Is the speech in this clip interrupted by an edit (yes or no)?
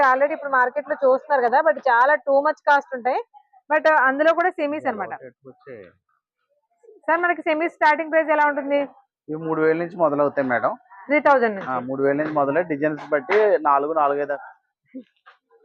no